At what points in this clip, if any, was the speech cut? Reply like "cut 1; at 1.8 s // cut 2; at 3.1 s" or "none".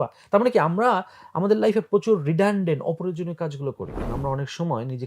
cut 1; at 4.1 s